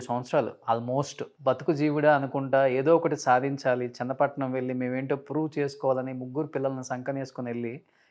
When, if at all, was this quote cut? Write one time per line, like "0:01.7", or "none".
0:01.2